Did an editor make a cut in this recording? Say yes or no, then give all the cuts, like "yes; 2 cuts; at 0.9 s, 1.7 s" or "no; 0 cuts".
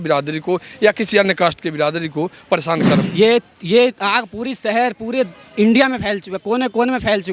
yes; 1 cut; at 3.0 s